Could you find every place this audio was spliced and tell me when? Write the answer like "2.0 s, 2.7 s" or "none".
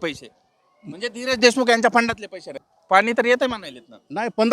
2.6 s